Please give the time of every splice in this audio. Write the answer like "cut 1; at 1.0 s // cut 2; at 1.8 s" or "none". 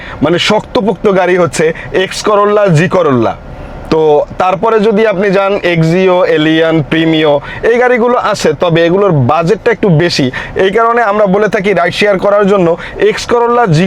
none

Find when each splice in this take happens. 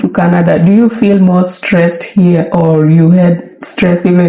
none

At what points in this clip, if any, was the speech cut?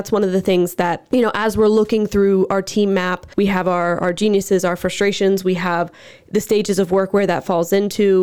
cut 1; at 1.0 s // cut 2; at 3.2 s

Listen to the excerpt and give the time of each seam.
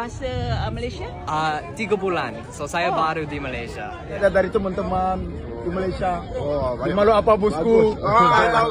cut 1; at 4.2 s

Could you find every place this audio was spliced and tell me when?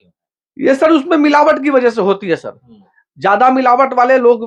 none

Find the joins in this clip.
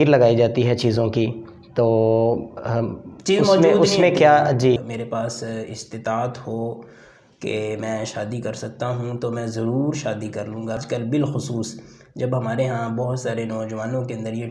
cut 1; at 4.8 s // cut 2; at 10.8 s

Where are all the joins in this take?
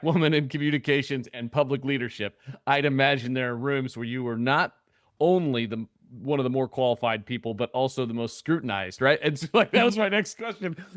none

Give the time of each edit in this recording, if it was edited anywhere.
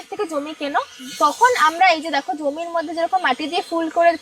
none

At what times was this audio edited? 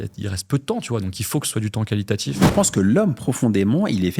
cut 1; at 2.4 s

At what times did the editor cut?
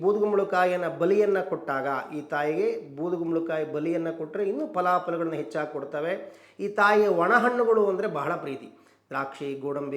none

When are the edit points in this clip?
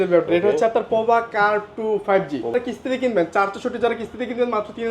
cut 1; at 2.5 s

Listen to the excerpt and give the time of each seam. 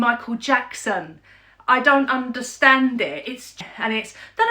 cut 1; at 3.6 s

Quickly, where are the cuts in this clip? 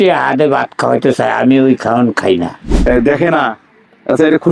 cut 1; at 2.7 s

